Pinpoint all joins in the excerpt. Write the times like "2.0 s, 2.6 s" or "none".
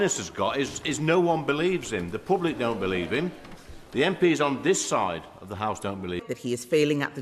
6.2 s